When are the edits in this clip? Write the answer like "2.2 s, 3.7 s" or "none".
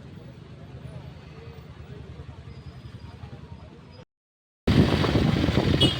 1.9 s